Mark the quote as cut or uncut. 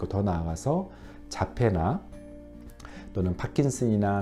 uncut